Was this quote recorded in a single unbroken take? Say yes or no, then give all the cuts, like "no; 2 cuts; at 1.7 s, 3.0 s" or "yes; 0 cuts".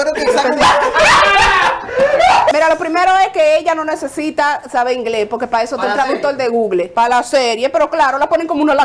no; 2 cuts; at 2.5 s, 6.9 s